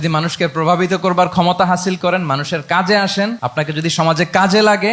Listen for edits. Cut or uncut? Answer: cut